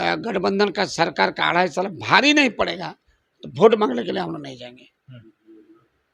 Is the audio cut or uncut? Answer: uncut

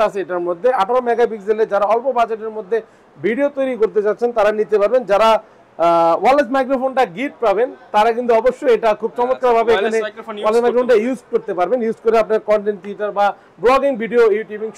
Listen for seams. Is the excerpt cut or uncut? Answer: uncut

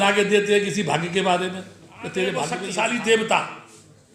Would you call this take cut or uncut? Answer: cut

